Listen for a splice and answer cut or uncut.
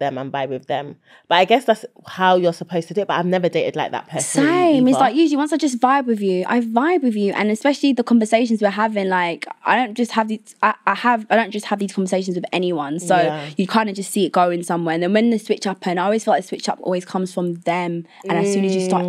uncut